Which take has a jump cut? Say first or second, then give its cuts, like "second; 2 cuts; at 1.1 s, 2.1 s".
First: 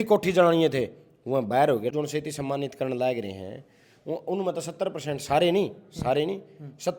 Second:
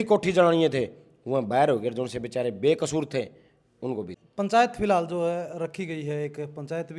first; 1 cut; at 1.9 s